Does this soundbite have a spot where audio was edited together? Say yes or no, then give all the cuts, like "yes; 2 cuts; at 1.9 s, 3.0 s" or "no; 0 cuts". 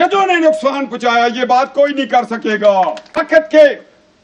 yes; 1 cut; at 3.2 s